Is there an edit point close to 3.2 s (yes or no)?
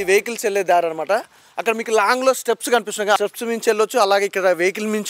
yes